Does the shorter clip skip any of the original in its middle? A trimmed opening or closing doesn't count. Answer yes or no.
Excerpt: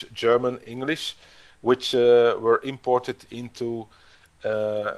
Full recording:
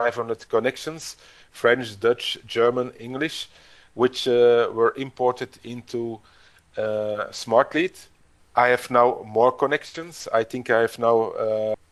no